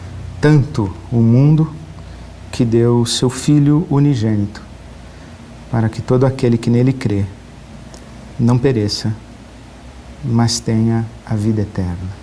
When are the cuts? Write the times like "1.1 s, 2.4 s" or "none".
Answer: 9.4 s